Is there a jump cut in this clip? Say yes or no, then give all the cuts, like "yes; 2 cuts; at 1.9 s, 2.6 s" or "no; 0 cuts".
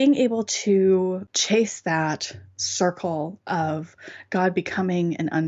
yes; 1 cut; at 1.3 s